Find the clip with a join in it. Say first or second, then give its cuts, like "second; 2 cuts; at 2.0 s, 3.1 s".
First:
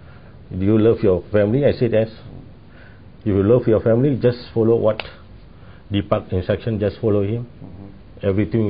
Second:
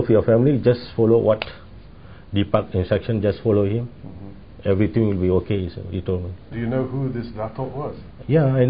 second; 1 cut; at 6.5 s